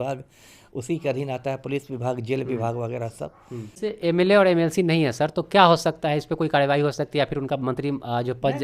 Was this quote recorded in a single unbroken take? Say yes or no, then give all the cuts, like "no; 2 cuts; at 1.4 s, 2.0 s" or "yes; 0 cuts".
no; 1 cut; at 3.7 s